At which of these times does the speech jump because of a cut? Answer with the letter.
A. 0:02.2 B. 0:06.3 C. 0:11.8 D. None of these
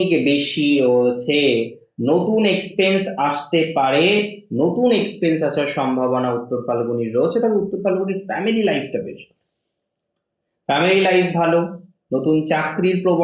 D